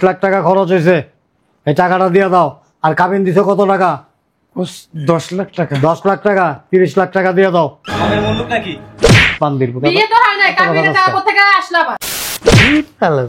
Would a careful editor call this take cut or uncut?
cut